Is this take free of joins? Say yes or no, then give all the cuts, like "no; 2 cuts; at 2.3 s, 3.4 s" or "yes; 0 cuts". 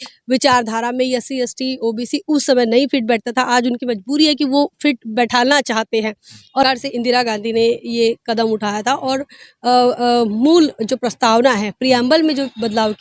no; 1 cut; at 6.6 s